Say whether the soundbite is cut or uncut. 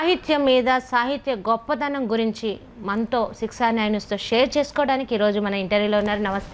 uncut